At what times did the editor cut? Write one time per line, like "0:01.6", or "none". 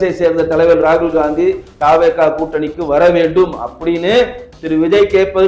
none